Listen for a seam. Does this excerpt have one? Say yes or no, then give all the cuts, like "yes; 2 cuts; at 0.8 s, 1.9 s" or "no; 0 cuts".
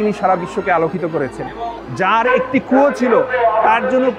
yes; 1 cut; at 1.8 s